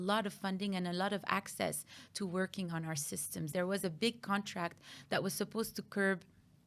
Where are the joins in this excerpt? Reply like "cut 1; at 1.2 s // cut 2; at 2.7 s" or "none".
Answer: cut 1; at 3.5 s